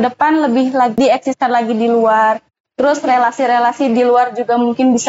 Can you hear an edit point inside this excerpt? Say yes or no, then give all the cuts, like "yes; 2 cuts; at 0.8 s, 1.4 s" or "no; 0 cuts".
yes; 1 cut; at 0.9 s